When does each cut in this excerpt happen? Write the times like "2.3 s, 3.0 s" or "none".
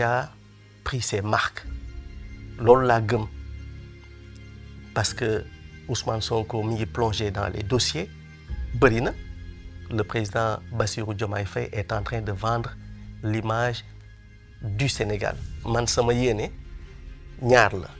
15.5 s